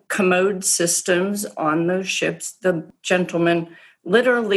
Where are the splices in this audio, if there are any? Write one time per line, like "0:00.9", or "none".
0:02.9